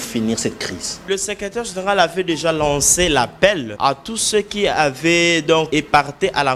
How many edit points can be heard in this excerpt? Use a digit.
3